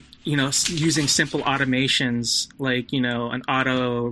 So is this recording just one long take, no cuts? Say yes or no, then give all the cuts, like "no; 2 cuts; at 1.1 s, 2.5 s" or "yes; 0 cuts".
yes; 0 cuts